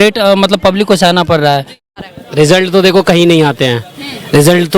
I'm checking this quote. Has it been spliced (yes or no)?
yes